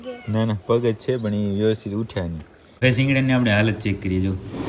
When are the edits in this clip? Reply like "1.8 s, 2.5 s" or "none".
2.8 s